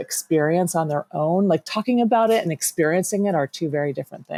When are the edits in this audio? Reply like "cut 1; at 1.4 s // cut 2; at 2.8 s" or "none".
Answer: none